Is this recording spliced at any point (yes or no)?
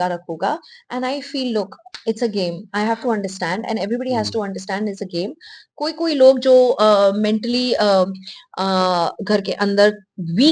no